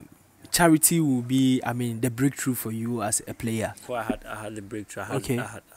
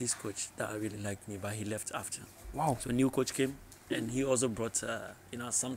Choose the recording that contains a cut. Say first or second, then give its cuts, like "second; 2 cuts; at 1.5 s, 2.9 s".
first; 1 cut; at 3.8 s